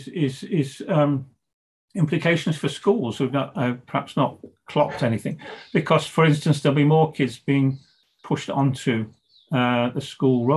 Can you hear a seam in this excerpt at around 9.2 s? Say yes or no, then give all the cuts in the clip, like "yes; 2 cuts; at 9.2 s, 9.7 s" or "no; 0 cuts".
no; 0 cuts